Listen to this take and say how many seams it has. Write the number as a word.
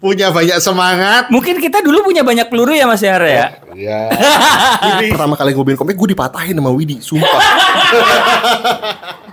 one